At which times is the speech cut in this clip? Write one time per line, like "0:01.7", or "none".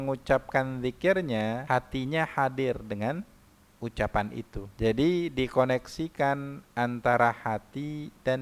0:01.6
0:04.6